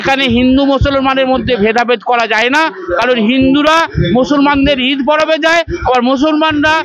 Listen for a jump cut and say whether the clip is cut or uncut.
uncut